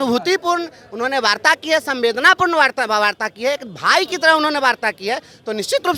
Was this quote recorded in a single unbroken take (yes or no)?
yes